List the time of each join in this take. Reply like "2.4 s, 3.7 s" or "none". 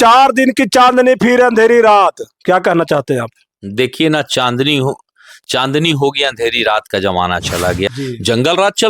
7.9 s